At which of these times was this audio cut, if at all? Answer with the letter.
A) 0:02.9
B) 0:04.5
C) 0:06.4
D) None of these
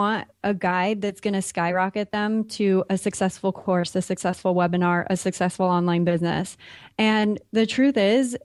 D